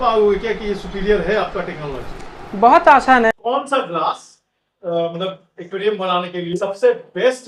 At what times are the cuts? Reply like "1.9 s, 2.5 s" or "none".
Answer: 3.3 s, 6.6 s

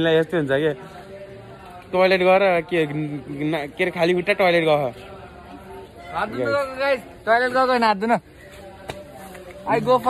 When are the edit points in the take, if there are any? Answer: none

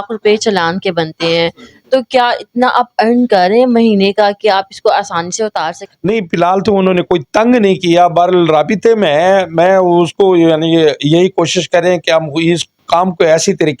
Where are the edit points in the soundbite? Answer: 5.8 s

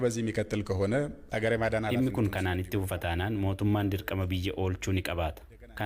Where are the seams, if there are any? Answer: none

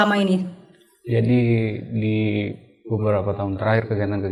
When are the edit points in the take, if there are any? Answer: none

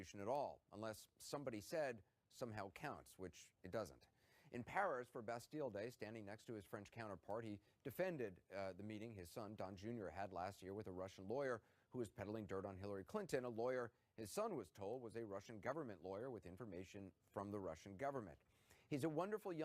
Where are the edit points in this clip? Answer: 12.3 s

